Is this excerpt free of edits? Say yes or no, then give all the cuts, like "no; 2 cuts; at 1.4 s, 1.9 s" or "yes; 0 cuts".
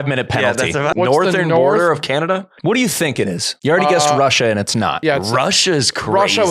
no; 4 cuts; at 0.9 s, 2.5 s, 3.5 s, 5.0 s